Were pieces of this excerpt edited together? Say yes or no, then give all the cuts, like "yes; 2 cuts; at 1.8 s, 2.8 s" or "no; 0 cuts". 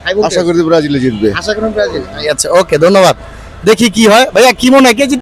no; 0 cuts